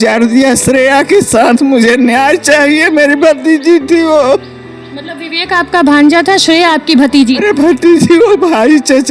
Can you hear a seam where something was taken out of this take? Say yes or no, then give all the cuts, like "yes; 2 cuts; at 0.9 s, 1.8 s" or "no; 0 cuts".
no; 0 cuts